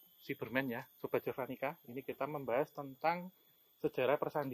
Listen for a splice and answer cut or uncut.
uncut